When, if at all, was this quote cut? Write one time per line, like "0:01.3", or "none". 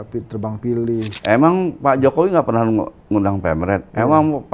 0:01.1